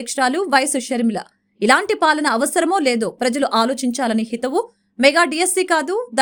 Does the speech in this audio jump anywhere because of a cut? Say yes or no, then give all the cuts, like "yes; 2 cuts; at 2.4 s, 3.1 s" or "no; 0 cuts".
no; 0 cuts